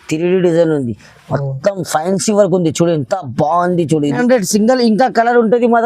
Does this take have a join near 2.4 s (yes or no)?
no